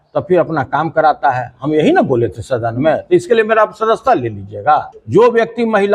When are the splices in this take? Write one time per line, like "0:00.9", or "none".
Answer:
0:05.0